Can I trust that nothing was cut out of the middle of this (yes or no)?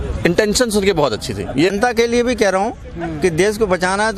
no